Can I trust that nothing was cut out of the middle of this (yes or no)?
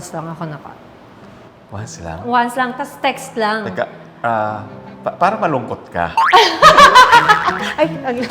yes